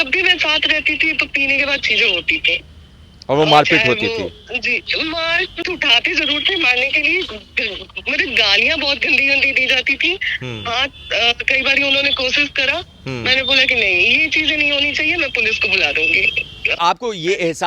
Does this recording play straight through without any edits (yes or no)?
no